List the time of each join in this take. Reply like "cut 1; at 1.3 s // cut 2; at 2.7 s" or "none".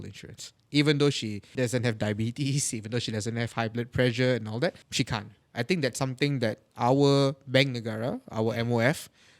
cut 1; at 1.5 s // cut 2; at 5.1 s